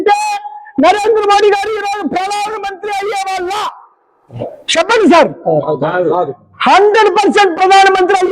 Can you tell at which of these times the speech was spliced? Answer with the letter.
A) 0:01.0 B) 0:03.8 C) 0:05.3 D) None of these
D